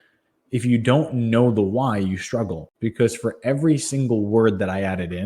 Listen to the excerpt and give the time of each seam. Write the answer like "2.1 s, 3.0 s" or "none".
2.6 s